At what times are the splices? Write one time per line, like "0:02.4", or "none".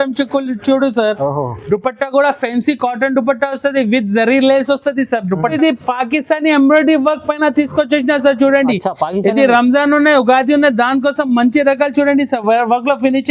0:05.5